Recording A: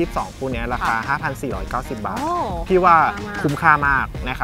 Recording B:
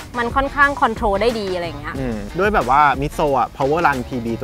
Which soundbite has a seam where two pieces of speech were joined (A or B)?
B